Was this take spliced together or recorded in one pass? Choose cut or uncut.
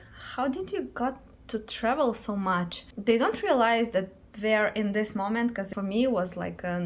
cut